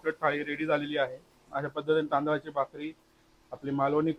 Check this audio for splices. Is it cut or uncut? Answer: uncut